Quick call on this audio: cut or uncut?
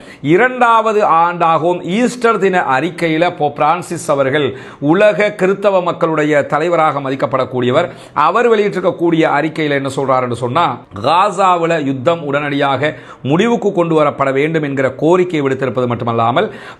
uncut